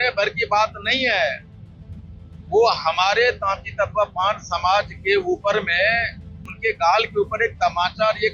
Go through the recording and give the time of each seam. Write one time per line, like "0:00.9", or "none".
none